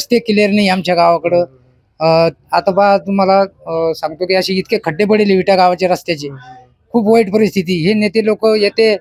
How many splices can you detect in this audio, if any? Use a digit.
0